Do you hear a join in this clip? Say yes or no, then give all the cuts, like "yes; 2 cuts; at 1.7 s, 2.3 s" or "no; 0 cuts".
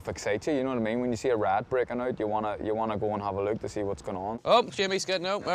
yes; 1 cut; at 4.4 s